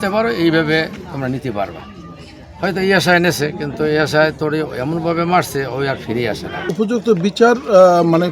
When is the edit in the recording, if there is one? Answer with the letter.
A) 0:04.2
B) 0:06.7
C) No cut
B